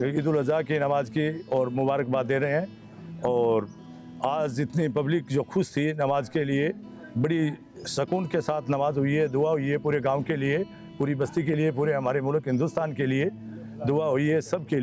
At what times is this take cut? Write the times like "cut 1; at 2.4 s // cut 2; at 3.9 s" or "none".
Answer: none